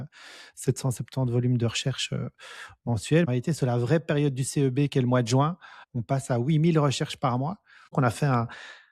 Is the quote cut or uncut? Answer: cut